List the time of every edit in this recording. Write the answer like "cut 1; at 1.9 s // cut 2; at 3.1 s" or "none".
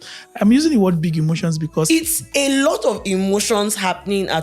cut 1; at 1.9 s